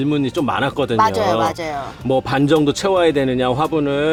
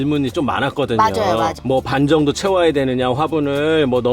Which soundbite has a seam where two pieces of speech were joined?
second; 1 cut; at 1.6 s

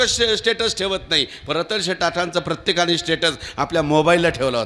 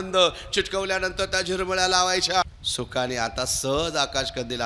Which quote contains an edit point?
second; 1 cut; at 2.4 s

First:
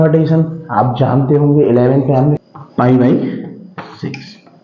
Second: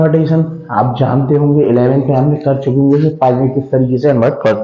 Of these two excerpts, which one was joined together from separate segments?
first; 1 cut; at 2.4 s

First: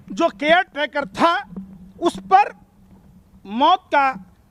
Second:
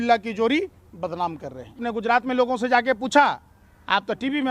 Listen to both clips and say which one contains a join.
second; 1 cut; at 1.8 s

